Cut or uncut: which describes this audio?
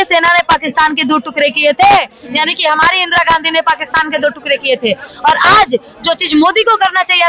uncut